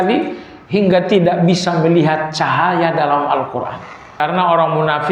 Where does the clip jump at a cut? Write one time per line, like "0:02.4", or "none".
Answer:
0:04.2